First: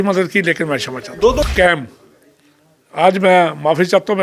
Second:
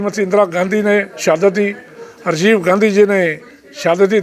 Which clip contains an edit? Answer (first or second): first